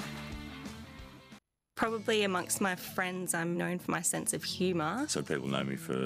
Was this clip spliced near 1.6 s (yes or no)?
yes